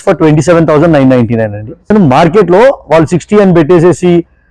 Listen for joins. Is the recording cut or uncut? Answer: cut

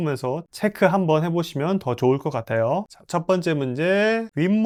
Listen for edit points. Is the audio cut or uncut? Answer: uncut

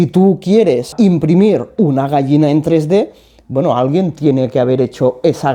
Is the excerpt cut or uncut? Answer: cut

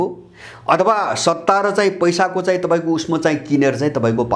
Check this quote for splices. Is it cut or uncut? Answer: uncut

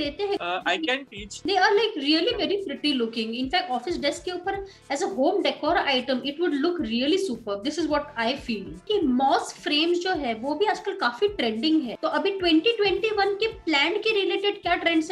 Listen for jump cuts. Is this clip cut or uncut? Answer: cut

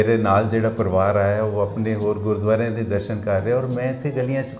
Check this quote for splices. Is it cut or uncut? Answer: uncut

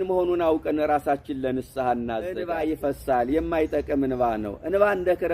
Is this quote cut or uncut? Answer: cut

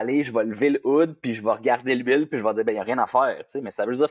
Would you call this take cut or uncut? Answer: uncut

